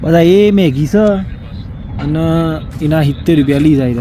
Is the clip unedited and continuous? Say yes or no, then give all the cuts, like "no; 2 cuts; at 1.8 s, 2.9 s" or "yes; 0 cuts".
yes; 0 cuts